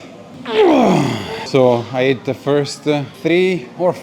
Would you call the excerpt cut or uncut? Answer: cut